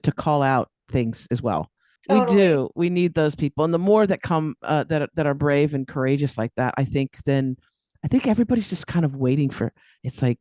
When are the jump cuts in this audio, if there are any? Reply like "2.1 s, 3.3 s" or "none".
1.9 s

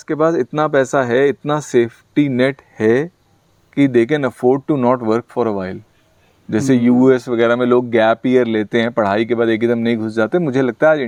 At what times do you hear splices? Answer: none

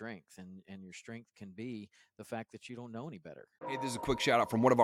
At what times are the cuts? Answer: 3.6 s

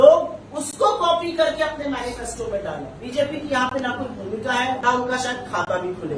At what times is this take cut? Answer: 2.9 s, 4.8 s

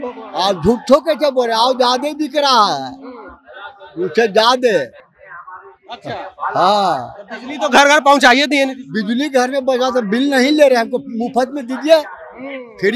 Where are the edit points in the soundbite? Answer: none

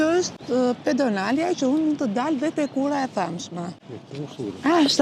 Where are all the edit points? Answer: 3.9 s

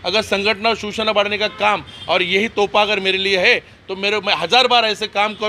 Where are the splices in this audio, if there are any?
none

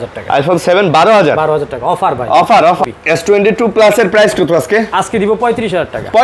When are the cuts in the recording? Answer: 2.8 s

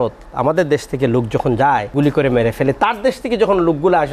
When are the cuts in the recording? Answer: 1.9 s

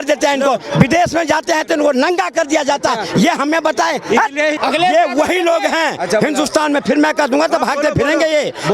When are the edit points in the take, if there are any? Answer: 4.6 s

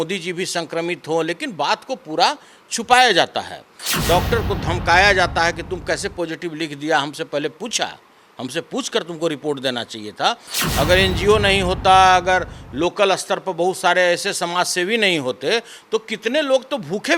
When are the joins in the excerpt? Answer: 3.8 s, 10.5 s

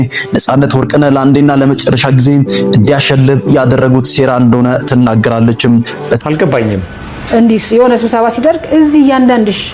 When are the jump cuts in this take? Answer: 6.2 s

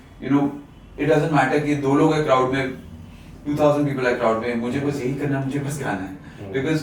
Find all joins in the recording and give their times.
none

